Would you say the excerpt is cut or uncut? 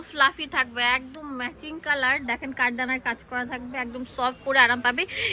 uncut